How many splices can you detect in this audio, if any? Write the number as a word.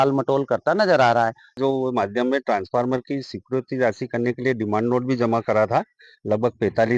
one